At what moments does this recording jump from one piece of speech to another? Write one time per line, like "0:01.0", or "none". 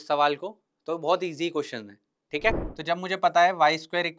0:02.7